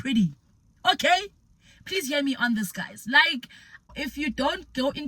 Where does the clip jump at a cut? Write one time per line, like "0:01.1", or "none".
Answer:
0:04.0